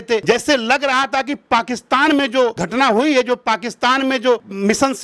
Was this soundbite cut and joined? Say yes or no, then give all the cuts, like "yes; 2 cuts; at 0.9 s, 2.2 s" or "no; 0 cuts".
no; 0 cuts